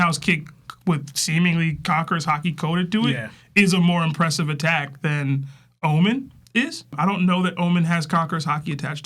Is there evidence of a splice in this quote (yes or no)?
no